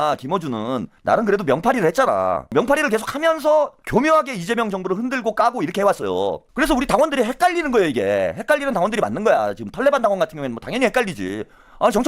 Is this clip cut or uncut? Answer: cut